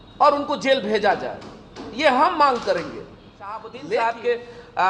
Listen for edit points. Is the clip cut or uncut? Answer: cut